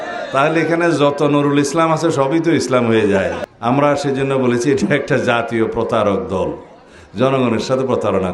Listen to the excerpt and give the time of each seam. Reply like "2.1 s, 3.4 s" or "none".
3.4 s

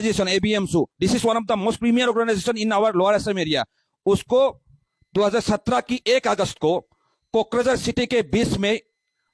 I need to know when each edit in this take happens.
none

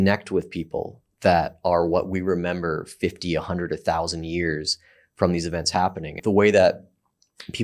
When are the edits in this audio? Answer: 6.1 s

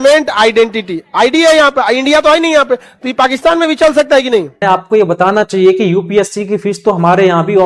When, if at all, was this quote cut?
4.6 s

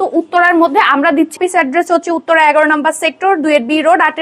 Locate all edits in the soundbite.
1.4 s

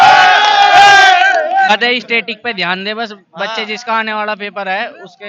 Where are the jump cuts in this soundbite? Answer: 1.7 s

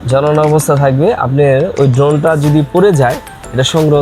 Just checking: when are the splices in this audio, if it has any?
none

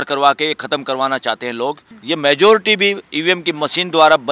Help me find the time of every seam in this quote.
1.9 s

